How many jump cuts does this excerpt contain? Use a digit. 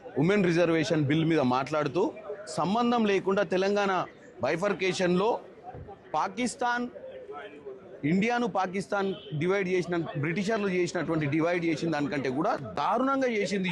0